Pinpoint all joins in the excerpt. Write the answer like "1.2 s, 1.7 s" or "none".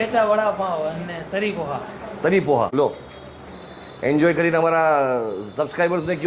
2.7 s